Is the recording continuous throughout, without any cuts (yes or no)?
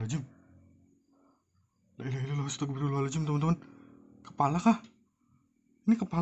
yes